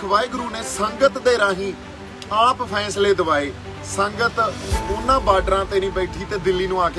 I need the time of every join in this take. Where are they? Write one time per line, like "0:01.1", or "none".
none